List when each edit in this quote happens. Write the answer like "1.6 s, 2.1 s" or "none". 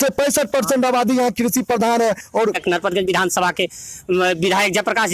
2.6 s